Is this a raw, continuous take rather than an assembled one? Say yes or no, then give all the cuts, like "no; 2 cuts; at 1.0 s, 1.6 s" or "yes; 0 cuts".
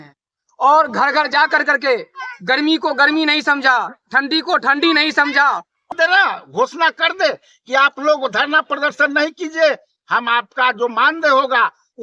no; 1 cut; at 5.9 s